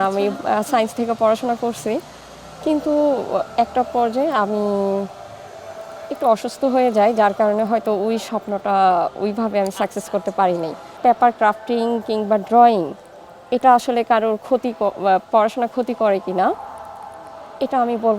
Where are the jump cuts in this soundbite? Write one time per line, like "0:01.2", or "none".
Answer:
none